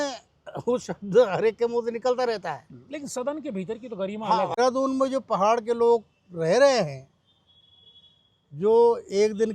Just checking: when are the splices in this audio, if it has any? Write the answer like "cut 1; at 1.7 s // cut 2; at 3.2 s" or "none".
cut 1; at 4.6 s